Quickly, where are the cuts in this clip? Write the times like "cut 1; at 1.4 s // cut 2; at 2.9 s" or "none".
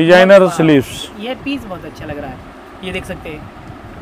none

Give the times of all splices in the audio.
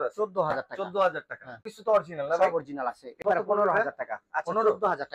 cut 1; at 1.7 s // cut 2; at 3.1 s

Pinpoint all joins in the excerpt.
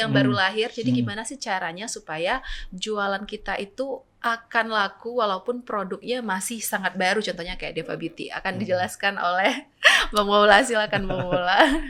none

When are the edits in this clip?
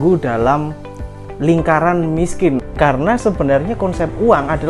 cut 1; at 2.6 s

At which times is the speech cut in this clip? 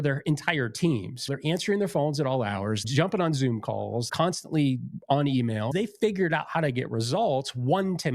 cut 1; at 1.2 s // cut 2; at 2.8 s // cut 3; at 4.1 s // cut 4; at 5.7 s

